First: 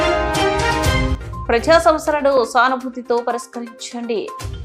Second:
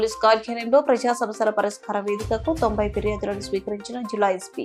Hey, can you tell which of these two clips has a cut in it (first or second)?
first